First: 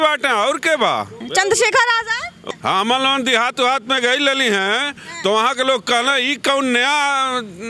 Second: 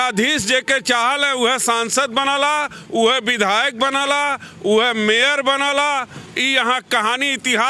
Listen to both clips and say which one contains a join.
first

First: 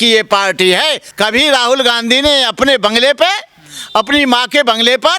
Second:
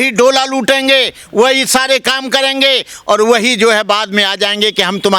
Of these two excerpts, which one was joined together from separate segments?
first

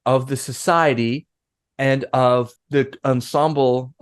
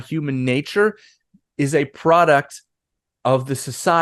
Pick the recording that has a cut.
first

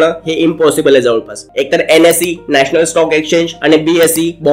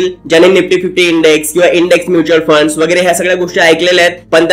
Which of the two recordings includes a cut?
first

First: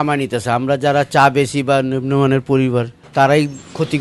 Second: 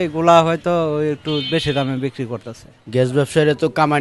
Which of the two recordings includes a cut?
second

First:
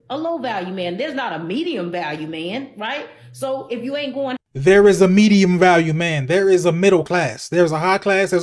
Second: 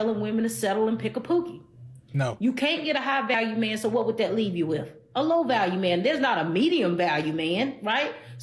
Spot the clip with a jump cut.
first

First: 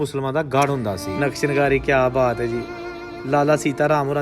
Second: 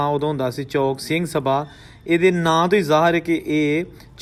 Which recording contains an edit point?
first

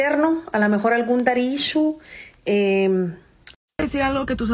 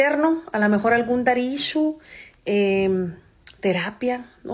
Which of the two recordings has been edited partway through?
first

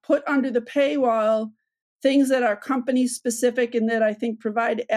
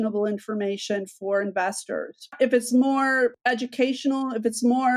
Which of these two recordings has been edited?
second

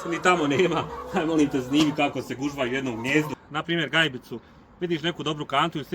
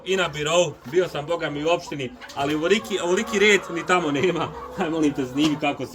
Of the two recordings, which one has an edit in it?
first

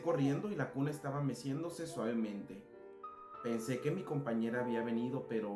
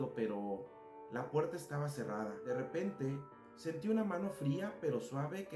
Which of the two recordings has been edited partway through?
second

